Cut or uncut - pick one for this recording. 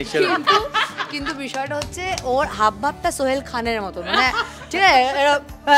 uncut